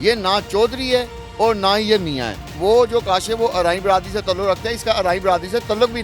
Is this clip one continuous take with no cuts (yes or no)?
no